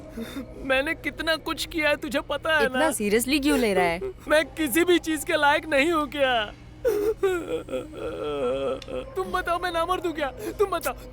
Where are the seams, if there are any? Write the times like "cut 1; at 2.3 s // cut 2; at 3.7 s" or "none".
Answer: cut 1; at 4.2 s